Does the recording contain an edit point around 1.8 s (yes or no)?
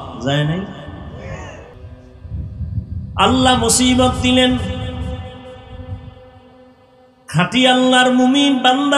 yes